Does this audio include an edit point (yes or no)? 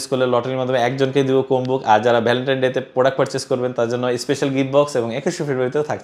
no